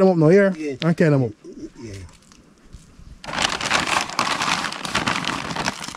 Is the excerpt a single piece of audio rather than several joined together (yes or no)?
yes